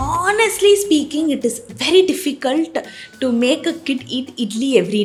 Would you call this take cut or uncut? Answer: uncut